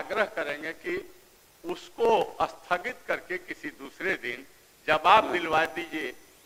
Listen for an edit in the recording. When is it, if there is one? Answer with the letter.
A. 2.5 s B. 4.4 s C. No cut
C